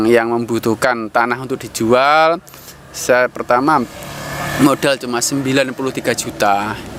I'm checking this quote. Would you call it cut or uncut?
uncut